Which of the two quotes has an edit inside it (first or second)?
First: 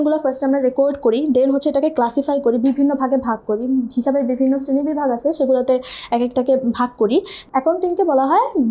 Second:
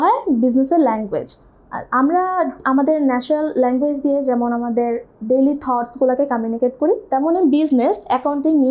first